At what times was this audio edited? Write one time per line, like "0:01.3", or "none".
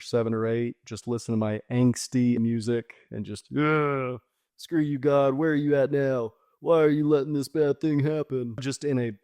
0:02.4